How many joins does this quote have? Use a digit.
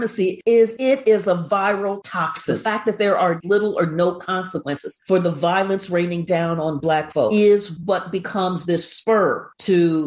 2